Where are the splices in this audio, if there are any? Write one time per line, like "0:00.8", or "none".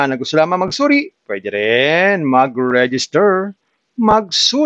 none